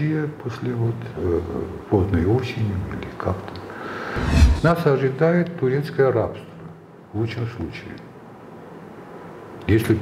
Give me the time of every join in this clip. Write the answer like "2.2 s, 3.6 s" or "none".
4.4 s